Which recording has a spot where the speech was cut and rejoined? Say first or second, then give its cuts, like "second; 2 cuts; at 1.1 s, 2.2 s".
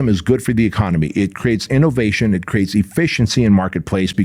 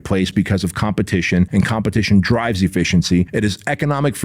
second; 2 cuts; at 1.5 s, 3.3 s